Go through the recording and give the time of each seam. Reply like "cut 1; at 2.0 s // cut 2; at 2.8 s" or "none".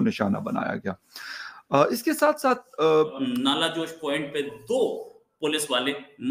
cut 1; at 3.2 s

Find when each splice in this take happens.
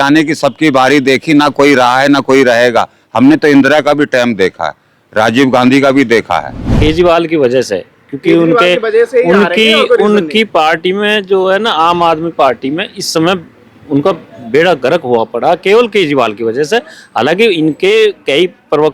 cut 1; at 6.6 s

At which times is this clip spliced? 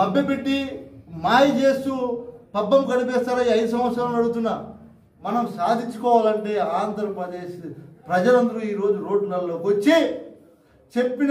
cut 1; at 5.1 s

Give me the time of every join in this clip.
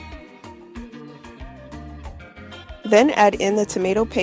cut 1; at 1.5 s // cut 2; at 2.3 s

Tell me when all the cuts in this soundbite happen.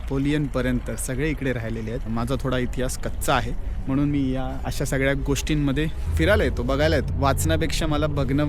cut 1; at 2.1 s // cut 2; at 6.0 s // cut 3; at 7.1 s

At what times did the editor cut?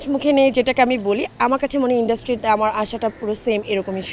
none

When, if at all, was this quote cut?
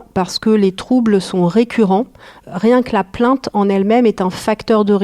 cut 1; at 2.4 s

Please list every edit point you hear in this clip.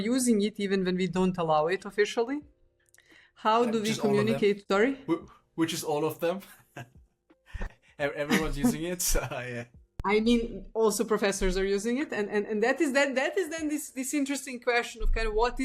cut 1; at 4.6 s

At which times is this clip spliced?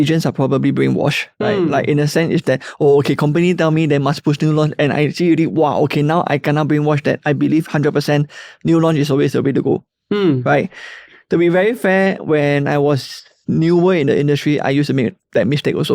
cut 1; at 1.3 s

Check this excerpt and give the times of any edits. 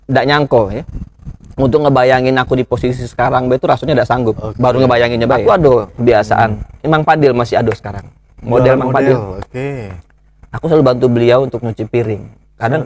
cut 1; at 5.4 s

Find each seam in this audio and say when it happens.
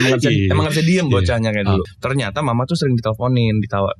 cut 1; at 2.0 s

